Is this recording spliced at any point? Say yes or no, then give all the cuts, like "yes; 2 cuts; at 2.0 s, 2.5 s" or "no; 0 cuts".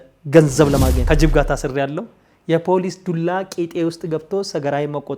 yes; 1 cut; at 1.0 s